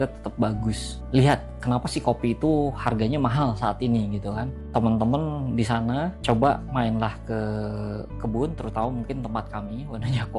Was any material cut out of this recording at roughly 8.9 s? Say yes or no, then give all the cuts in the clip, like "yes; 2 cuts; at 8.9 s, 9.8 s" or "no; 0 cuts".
no; 1 cut; at 1.0 s